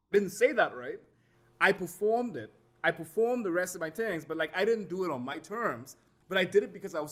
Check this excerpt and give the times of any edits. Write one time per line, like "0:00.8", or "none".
none